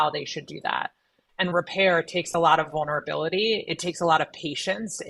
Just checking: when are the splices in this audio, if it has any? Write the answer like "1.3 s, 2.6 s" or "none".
1.5 s